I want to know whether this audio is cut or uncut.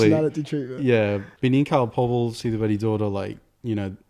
cut